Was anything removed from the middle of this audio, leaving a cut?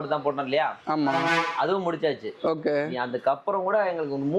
no; 0 cuts

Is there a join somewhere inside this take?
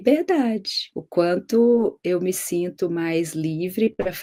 no; 0 cuts

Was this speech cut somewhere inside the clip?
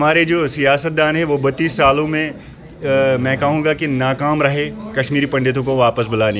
no; 0 cuts

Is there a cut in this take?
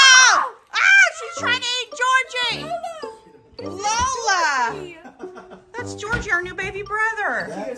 no; 0 cuts

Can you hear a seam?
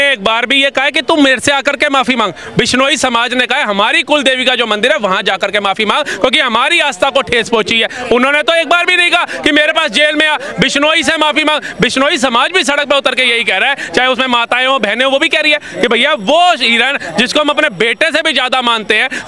no; 0 cuts

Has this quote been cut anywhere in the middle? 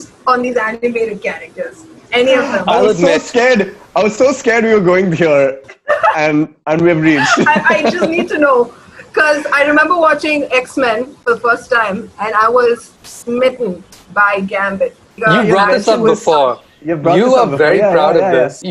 no; 0 cuts

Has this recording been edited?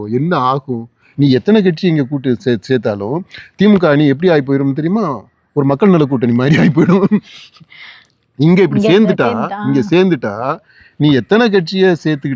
no; 0 cuts

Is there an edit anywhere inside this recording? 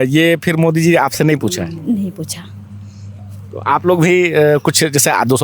no; 0 cuts

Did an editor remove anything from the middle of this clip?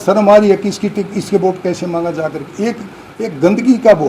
no; 0 cuts

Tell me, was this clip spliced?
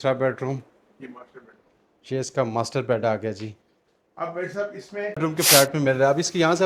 yes; 1 cut; at 5.2 s

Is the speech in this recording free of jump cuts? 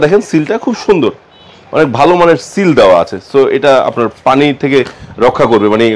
yes; 0 cuts

